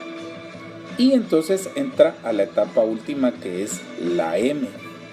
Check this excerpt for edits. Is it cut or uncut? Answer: cut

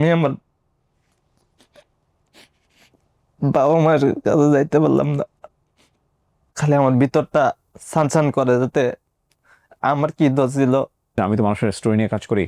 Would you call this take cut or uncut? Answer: cut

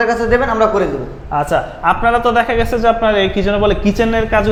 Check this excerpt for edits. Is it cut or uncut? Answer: uncut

